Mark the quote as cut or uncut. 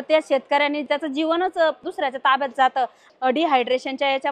cut